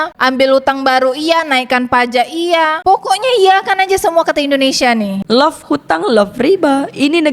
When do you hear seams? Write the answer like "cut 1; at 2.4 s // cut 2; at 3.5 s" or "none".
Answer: cut 1; at 2.8 s // cut 2; at 5.2 s